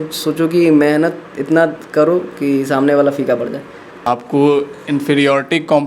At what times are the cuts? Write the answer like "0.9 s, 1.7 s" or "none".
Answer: 4.0 s